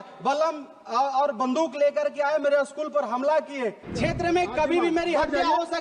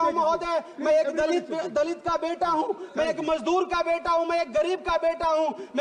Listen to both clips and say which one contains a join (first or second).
first